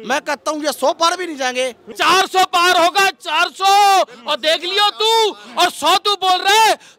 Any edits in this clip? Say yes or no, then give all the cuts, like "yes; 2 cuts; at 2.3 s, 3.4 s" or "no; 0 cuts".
yes; 1 cut; at 1.9 s